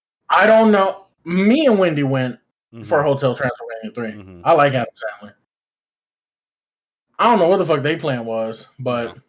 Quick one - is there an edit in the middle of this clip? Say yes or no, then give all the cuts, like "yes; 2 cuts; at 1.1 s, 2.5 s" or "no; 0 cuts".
no; 0 cuts